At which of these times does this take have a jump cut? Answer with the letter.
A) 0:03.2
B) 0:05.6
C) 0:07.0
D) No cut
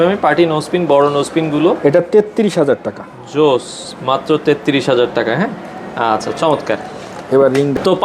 D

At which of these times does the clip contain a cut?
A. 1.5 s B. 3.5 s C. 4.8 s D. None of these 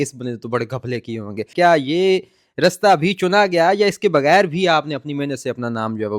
A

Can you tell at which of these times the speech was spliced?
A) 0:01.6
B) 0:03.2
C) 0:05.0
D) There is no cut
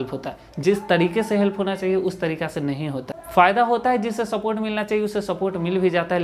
B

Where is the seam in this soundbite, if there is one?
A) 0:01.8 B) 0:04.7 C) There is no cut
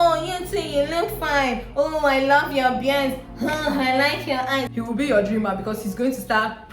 B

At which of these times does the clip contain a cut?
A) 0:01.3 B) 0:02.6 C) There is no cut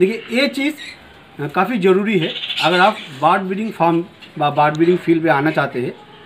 C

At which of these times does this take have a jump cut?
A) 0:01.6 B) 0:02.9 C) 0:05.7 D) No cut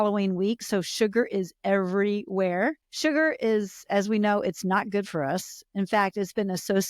B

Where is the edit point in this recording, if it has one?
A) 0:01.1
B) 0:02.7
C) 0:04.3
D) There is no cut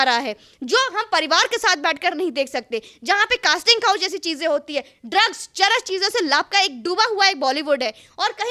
D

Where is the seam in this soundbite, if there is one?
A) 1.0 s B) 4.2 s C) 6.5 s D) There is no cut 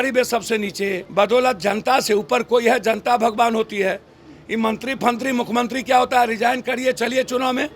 A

